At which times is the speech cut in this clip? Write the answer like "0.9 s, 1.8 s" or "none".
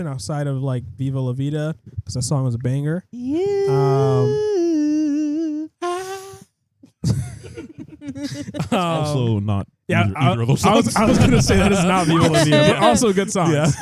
none